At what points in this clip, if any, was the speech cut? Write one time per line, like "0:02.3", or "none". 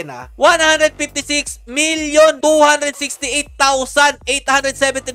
none